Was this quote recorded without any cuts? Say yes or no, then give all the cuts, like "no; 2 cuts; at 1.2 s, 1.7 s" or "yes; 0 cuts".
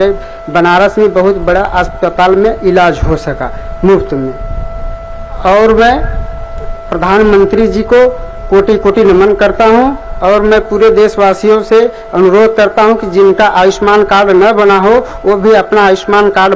yes; 0 cuts